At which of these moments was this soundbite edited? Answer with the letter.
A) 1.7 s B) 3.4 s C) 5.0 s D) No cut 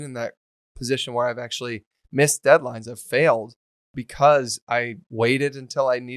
C